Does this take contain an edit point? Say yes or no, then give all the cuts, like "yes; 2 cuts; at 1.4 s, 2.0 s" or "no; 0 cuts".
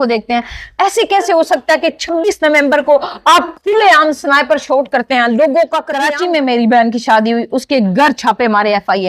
yes; 1 cut; at 5.9 s